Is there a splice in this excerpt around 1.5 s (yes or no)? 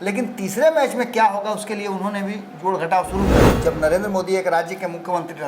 no